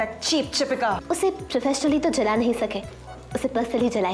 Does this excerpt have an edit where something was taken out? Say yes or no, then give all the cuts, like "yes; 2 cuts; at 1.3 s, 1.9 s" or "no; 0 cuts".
yes; 1 cut; at 1.0 s